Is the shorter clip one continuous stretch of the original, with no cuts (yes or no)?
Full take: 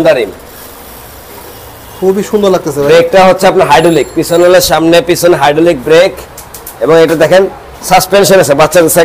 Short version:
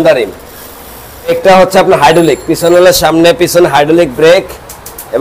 no